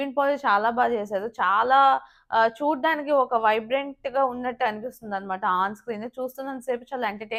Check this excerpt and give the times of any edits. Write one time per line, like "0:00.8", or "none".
none